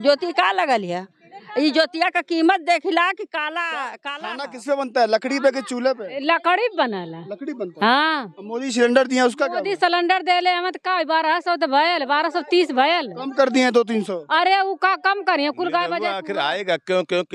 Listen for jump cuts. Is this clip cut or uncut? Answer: cut